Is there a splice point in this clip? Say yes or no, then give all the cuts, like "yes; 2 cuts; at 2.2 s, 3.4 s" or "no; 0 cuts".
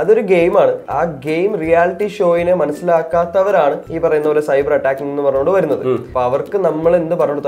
yes; 3 cuts; at 0.8 s, 3.9 s, 6.1 s